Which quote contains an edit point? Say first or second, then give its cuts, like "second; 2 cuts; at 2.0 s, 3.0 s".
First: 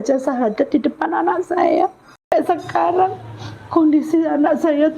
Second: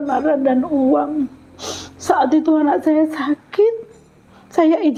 first; 1 cut; at 2.3 s